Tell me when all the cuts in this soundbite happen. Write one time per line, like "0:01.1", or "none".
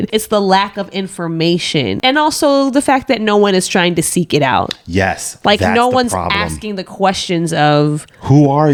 none